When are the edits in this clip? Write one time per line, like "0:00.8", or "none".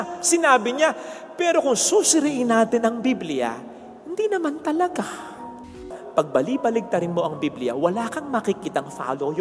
0:05.7